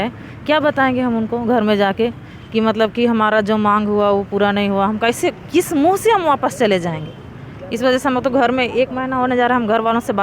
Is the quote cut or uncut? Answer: uncut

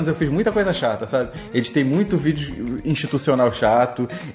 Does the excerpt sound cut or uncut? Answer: uncut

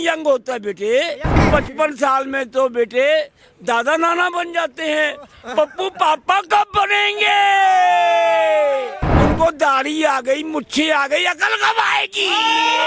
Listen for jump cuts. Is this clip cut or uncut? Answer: cut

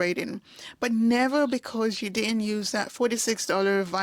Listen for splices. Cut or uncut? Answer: uncut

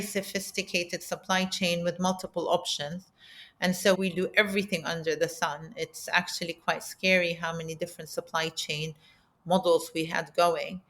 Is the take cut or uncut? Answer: cut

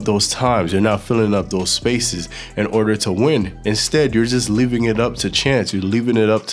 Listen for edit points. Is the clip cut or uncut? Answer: uncut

